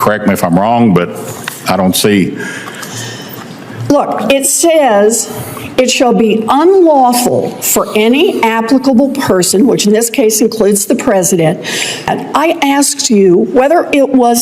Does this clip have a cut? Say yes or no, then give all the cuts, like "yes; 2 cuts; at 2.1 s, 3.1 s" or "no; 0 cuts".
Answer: yes; 1 cut; at 12.1 s